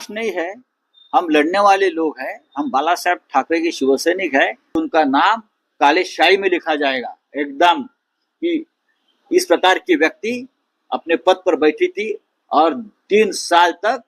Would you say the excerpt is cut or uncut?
cut